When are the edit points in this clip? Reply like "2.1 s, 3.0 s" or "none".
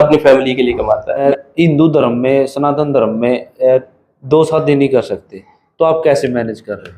1.2 s